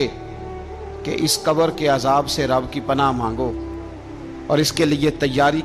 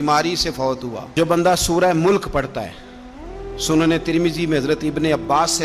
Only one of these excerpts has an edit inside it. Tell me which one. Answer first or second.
second